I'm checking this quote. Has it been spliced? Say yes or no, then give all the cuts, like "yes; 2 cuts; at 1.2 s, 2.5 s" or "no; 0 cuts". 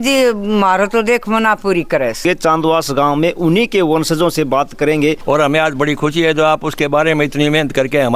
yes; 2 cuts; at 2.2 s, 5.2 s